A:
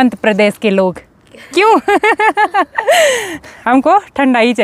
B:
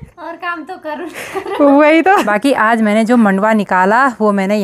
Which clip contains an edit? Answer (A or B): B